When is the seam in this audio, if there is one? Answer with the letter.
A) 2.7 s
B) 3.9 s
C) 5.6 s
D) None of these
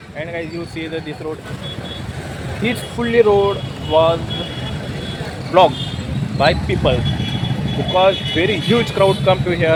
D